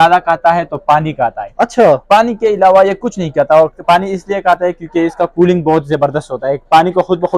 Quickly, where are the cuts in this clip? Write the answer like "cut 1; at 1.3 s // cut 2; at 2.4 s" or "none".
none

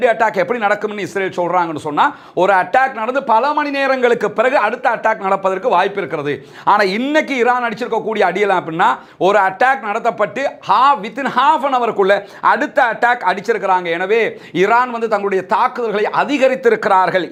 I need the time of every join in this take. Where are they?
none

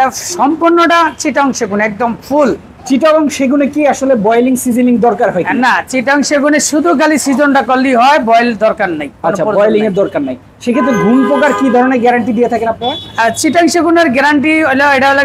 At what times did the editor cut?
none

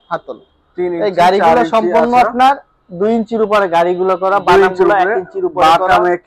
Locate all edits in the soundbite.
none

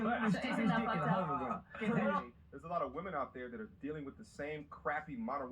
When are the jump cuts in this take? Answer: cut 1; at 2.2 s

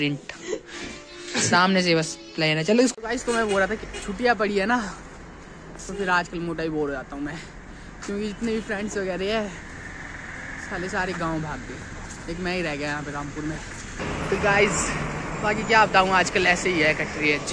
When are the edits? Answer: cut 1; at 2.9 s // cut 2; at 14.0 s

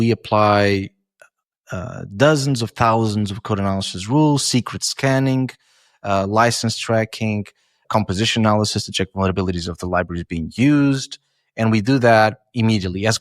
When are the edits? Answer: cut 1; at 7.8 s

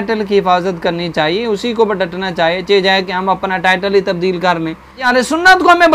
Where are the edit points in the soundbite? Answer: cut 1; at 5.0 s

